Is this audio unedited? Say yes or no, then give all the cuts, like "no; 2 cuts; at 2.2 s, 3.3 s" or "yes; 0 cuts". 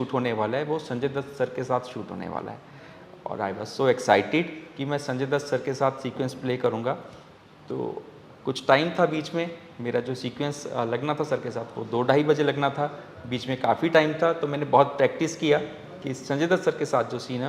yes; 0 cuts